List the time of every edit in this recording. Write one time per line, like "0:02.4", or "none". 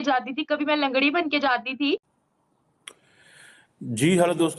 0:02.2